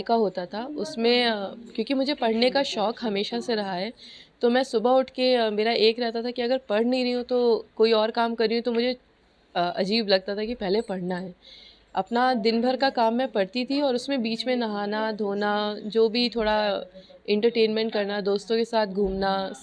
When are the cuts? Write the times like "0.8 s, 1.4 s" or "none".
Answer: none